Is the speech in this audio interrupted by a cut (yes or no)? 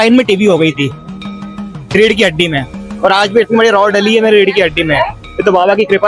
no